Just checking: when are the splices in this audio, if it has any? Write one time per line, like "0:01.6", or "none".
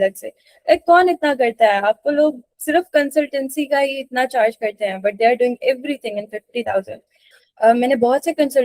0:07.3